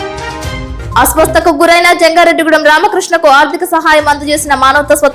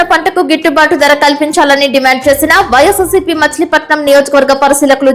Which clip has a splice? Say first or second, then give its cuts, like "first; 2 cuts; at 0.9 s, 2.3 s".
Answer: first; 1 cut; at 0.9 s